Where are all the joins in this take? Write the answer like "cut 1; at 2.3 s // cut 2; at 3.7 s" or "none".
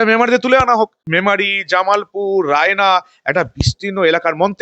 cut 1; at 1.0 s

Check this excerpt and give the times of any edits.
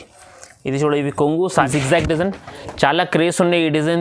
cut 1; at 1.7 s

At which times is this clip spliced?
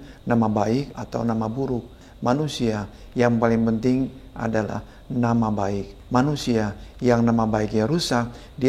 cut 1; at 0.9 s // cut 2; at 2.0 s // cut 3; at 5.9 s

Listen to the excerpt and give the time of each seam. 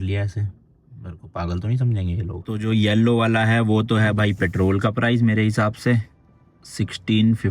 cut 1; at 2.5 s

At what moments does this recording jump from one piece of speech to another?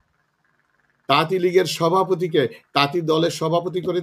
none

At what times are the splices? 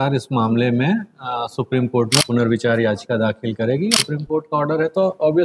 cut 1; at 2.2 s // cut 2; at 3.9 s

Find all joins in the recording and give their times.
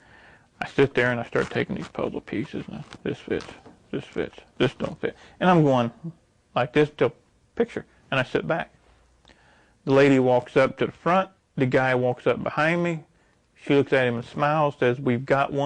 none

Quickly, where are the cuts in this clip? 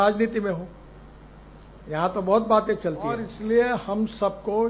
cut 1; at 3.3 s

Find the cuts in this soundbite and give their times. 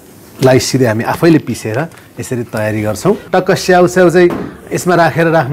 cut 1; at 3.2 s

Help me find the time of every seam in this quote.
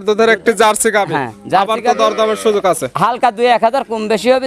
none

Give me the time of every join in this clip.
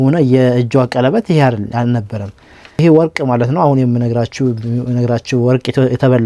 cut 1; at 2.8 s

